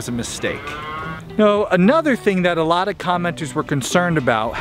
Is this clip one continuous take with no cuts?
no; 1 cut; at 1.0 s

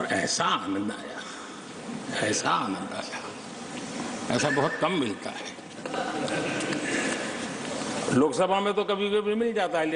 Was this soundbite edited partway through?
no; 0 cuts

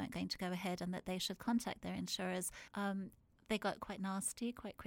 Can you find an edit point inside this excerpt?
yes; 1 cut; at 2.6 s

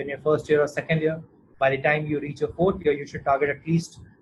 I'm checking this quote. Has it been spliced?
no; 0 cuts

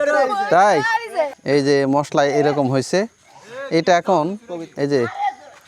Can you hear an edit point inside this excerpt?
yes; 1 cut; at 1.4 s

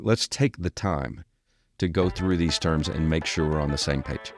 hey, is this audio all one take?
yes; 0 cuts

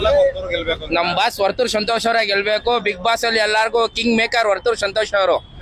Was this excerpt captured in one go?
yes; 0 cuts

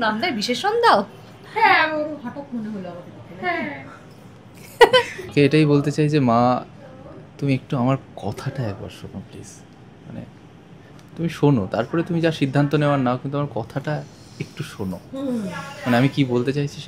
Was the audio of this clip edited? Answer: yes; 1 cut; at 5.3 s

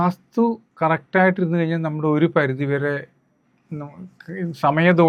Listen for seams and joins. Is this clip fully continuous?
yes; 0 cuts

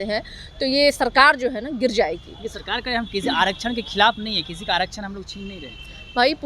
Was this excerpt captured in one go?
yes; 0 cuts

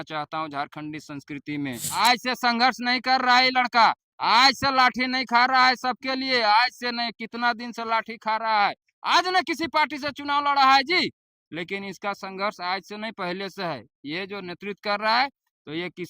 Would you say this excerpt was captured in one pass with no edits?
no; 1 cut; at 2.0 s

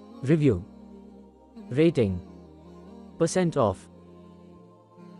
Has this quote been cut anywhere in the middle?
yes; 1 cut; at 3.7 s

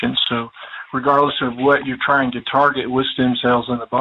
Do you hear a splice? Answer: no; 0 cuts

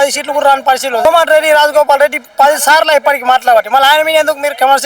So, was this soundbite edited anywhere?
yes; 1 cut; at 1.0 s

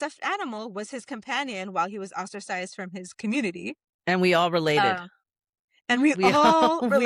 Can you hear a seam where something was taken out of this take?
no; 0 cuts

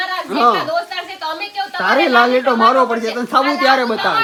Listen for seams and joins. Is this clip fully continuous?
yes; 0 cuts

